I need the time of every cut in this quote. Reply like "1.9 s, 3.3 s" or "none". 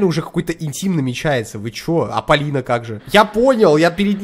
3.0 s

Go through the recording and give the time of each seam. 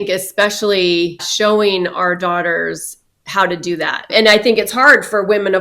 1.2 s, 4.1 s

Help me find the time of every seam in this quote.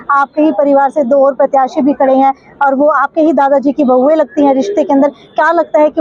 none

